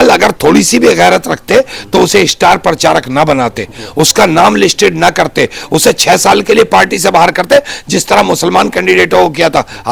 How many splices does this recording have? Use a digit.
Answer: 0